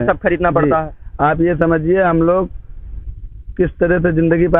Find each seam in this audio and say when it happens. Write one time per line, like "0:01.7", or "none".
none

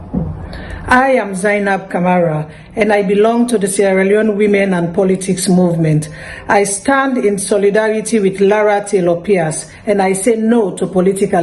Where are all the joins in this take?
none

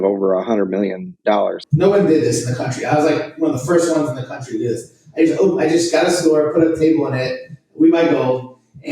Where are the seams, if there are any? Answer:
0:01.6

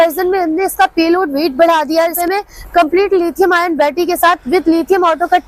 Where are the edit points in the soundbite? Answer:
0:02.1

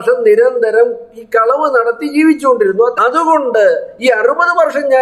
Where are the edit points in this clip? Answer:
0:03.0

